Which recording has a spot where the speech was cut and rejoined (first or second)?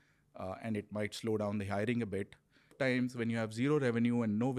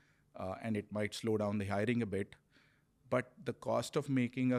first